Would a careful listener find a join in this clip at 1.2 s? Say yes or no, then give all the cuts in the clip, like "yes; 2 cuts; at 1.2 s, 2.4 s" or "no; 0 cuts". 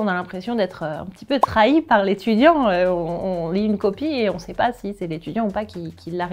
no; 0 cuts